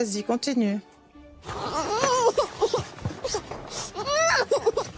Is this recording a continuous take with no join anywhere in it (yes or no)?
yes